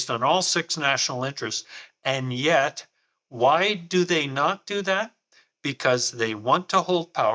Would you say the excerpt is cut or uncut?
uncut